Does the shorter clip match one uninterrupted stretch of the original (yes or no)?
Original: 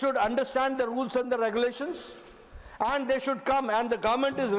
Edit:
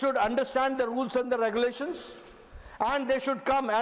yes